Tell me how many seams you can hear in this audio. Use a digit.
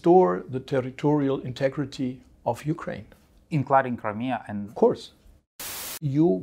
1